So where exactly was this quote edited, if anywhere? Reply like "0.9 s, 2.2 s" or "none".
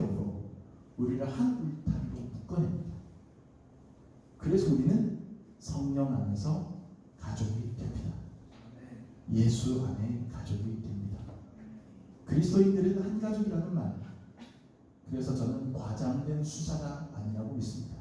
12.1 s